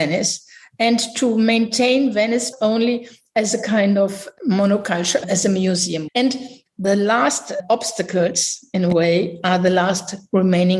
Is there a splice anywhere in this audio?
yes; 2 cuts; at 2.5 s, 6.0 s

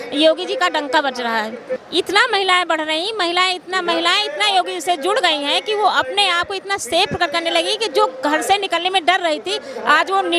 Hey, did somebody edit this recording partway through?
yes; 1 cut; at 1.8 s

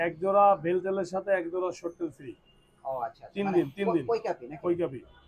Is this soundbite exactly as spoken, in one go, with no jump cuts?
yes; 0 cuts

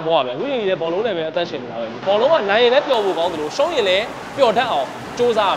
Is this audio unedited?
no; 1 cut; at 2.0 s

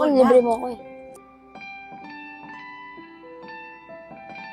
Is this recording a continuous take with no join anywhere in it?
no; 1 cut; at 1.2 s

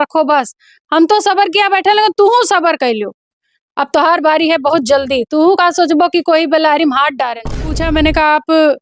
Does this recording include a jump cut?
yes; 1 cut; at 7.8 s

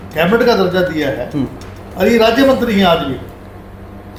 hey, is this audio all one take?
yes; 0 cuts

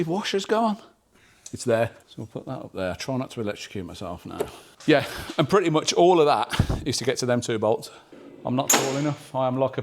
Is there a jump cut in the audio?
yes; 3 cuts; at 2.0 s, 4.6 s, 7.9 s

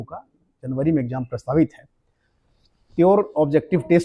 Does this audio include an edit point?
no; 0 cuts

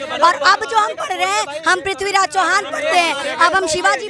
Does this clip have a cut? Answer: no; 0 cuts

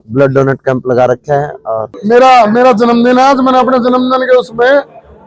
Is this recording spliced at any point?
yes; 1 cut; at 1.9 s

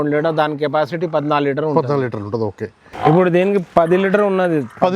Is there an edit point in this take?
yes; 1 cut; at 2.9 s

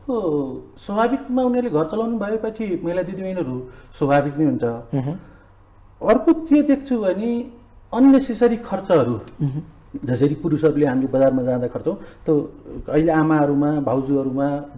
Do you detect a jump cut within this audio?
no; 0 cuts

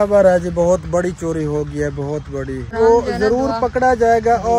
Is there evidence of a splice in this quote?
yes; 1 cut; at 2.7 s

